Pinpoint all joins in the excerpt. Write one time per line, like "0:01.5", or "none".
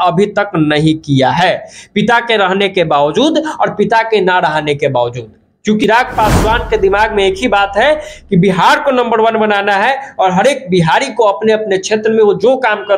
0:05.8